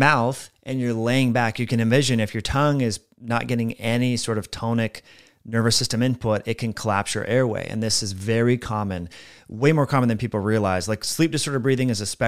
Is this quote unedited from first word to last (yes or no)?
yes